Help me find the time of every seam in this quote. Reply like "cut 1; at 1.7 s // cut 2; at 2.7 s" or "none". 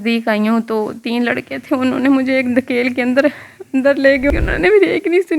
cut 1; at 4.3 s